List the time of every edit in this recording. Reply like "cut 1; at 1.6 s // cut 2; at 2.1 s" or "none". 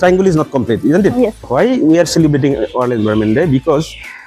cut 1; at 1.4 s